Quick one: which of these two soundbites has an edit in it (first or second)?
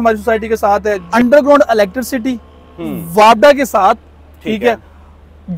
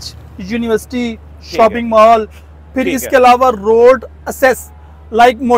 first